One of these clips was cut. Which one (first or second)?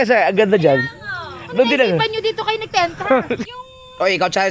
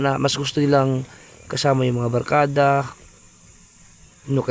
first